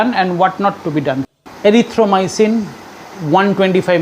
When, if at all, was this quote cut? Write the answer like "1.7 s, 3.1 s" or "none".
1.2 s